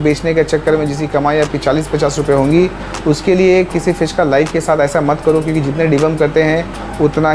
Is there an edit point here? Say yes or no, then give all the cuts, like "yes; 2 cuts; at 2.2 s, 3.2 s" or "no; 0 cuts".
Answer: no; 0 cuts